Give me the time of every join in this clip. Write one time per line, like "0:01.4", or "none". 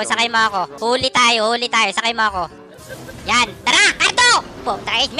none